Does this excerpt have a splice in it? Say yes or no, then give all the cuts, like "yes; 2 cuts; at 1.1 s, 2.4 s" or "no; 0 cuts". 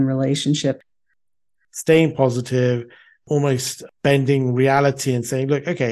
yes; 2 cuts; at 1.2 s, 3.3 s